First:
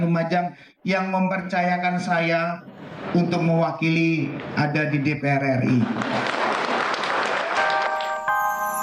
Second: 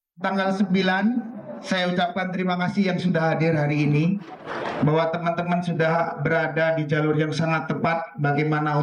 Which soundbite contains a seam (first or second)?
first